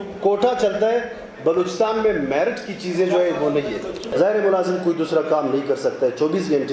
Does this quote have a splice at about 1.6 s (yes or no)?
no